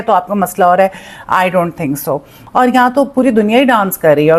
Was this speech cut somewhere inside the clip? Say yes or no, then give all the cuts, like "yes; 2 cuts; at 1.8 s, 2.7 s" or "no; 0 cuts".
yes; 1 cut; at 2.4 s